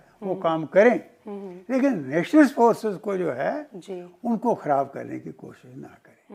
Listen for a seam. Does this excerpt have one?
no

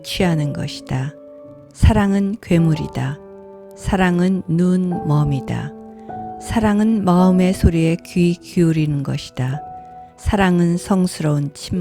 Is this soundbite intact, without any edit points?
yes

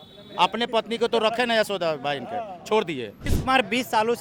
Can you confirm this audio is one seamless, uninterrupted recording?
no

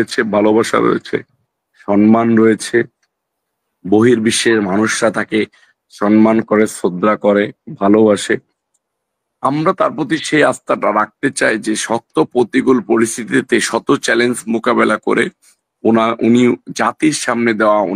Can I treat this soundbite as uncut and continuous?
yes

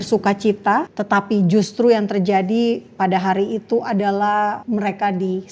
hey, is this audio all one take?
no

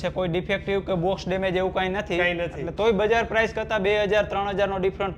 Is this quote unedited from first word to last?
yes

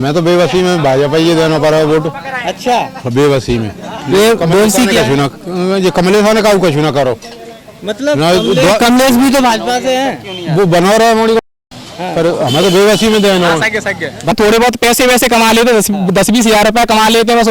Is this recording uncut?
no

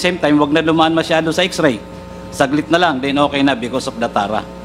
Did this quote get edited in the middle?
no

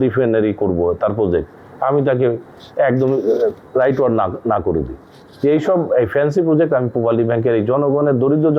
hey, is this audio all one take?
yes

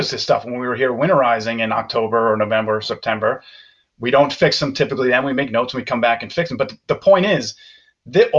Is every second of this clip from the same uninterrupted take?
yes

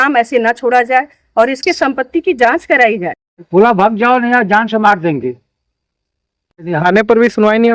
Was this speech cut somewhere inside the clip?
yes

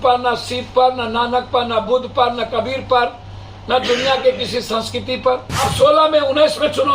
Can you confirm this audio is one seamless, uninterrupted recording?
no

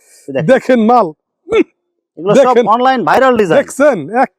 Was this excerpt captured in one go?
yes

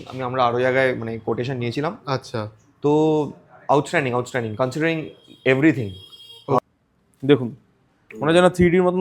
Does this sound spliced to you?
yes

